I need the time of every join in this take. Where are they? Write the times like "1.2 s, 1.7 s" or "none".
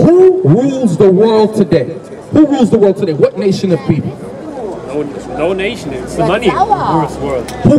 none

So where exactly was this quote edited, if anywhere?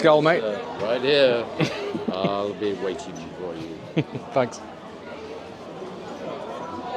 none

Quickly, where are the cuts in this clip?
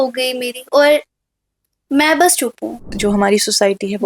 2.8 s

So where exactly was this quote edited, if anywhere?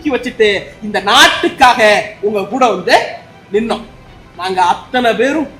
4.1 s

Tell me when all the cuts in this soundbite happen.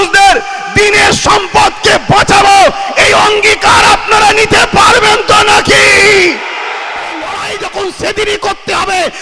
7.4 s

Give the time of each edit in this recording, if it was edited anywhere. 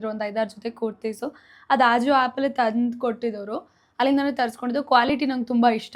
none

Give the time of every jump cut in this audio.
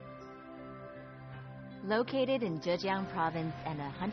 1.0 s

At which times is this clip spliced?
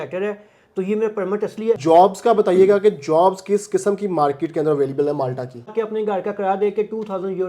1.8 s, 5.7 s

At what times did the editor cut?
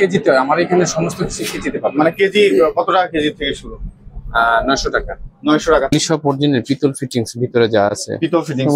5.9 s

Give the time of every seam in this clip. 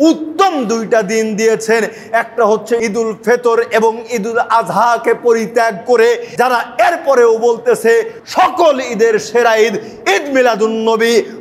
2.8 s, 6.3 s, 8.2 s

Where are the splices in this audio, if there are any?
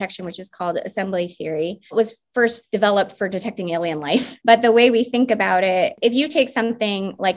1.9 s, 4.3 s, 6.0 s

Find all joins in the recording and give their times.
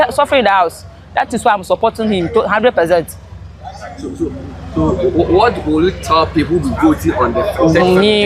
none

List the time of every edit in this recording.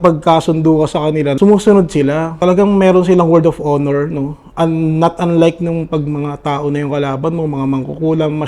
1.4 s, 2.4 s

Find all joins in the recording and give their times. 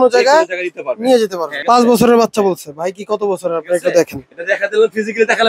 1.5 s

